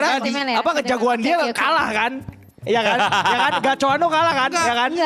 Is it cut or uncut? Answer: uncut